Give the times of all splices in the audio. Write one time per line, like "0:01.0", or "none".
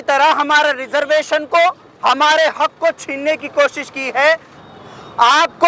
0:04.5